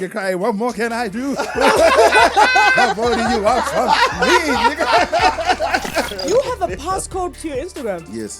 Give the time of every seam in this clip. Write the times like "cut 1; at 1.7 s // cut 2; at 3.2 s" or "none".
cut 1; at 6.2 s // cut 2; at 7.4 s